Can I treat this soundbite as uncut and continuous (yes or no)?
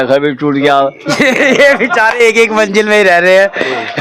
no